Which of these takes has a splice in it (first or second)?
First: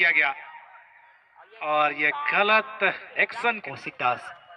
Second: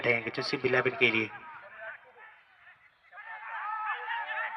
first